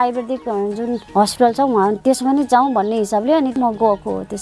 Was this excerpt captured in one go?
no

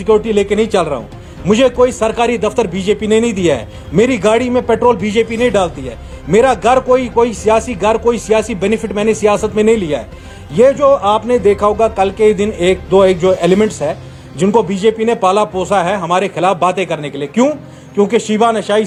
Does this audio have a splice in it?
no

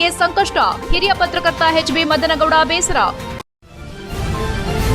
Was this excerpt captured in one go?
no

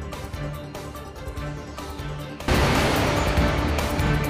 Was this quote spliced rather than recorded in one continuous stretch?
no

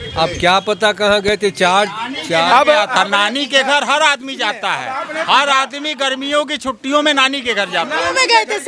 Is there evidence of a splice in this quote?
no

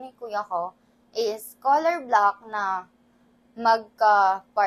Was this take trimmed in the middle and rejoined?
no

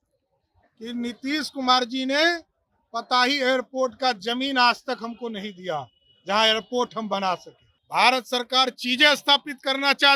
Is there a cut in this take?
yes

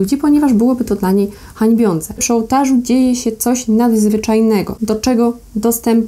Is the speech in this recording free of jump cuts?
no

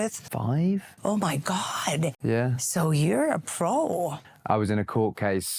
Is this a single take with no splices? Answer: no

